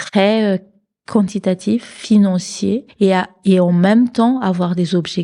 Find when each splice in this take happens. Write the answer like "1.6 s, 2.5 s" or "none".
2.9 s

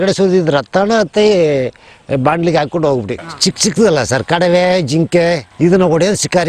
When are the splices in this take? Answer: 3.2 s

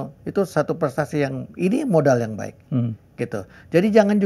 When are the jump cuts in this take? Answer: none

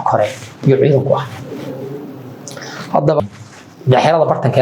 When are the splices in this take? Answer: 3.2 s

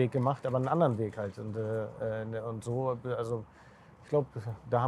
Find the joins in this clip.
none

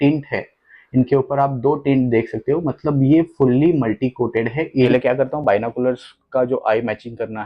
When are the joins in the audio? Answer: 4.8 s

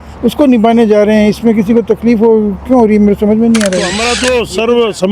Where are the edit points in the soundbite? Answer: 4.1 s

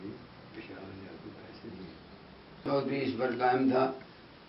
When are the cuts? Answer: 2.6 s

